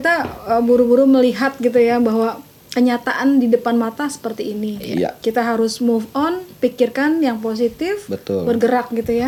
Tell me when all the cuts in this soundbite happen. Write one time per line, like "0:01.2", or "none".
none